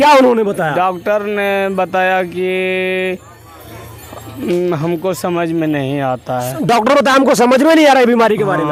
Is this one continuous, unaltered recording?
yes; 0 cuts

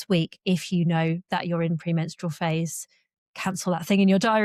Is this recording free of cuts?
yes; 0 cuts

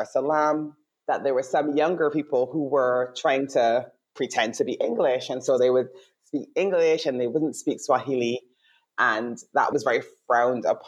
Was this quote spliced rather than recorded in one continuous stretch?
yes; 1 cut; at 9.7 s

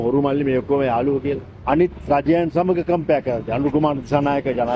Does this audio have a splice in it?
yes; 1 cut; at 1.5 s

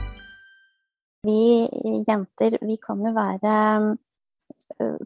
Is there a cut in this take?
yes; 1 cut; at 1.2 s

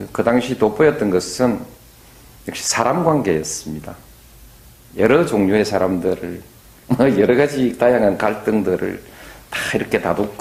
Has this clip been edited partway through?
no; 0 cuts

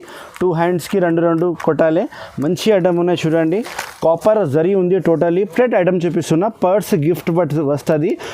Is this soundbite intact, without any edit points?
no; 1 cut; at 5.5 s

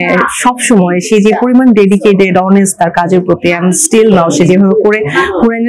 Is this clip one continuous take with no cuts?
yes; 0 cuts

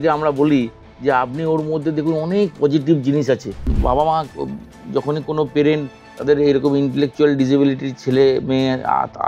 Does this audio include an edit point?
yes; 1 cut; at 3.7 s

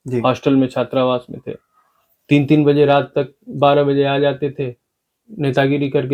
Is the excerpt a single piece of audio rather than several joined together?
yes; 0 cuts

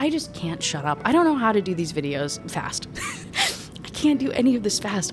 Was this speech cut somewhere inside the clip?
yes; 1 cut; at 2.4 s

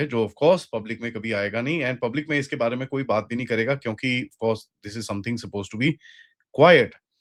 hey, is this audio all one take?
yes; 0 cuts

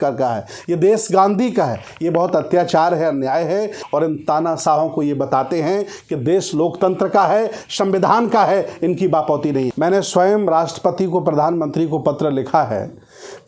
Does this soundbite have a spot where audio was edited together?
yes; 2 cuts; at 3.8 s, 9.7 s

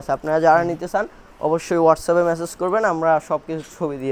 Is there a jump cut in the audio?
no; 0 cuts

